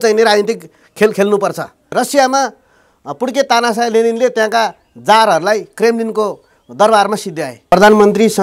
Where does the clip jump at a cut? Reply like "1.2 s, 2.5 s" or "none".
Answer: 1.9 s, 7.6 s